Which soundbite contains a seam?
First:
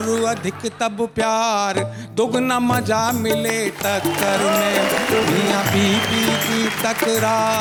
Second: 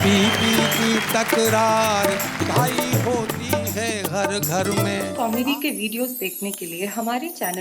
second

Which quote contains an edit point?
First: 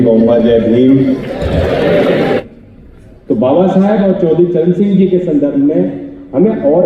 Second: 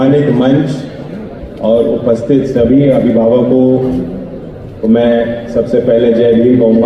first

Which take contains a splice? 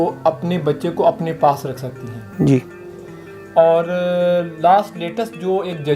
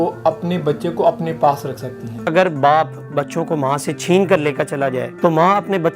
second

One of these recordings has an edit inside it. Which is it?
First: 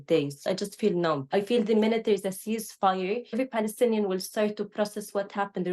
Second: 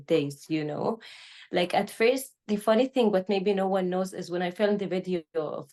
first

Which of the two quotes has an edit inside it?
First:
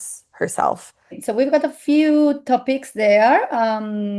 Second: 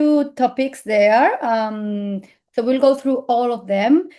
first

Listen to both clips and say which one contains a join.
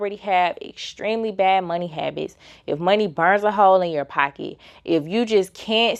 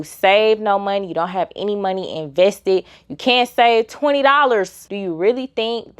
second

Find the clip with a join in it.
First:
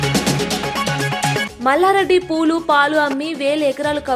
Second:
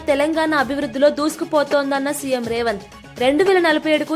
first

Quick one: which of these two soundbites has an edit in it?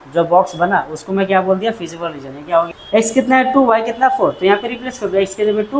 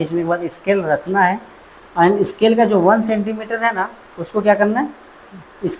first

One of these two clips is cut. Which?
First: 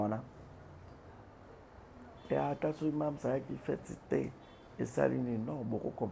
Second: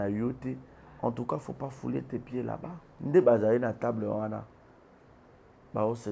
second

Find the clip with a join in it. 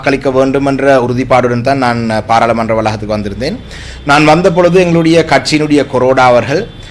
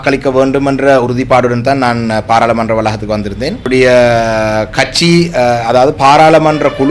second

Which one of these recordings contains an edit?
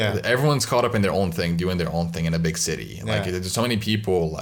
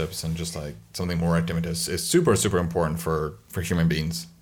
second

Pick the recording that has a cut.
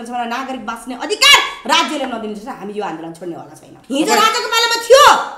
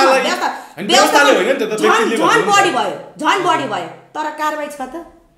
first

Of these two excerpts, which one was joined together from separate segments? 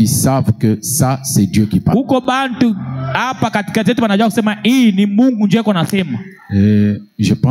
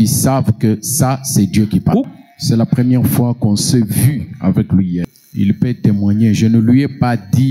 second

